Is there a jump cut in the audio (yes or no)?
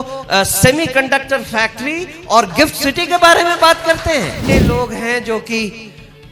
yes